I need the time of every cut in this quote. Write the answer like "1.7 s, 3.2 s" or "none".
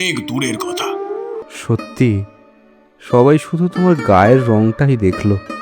1.4 s